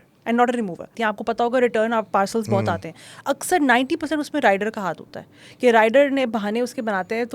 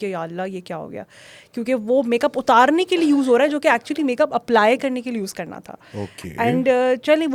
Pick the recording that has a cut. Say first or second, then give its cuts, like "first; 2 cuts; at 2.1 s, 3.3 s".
first; 1 cut; at 0.9 s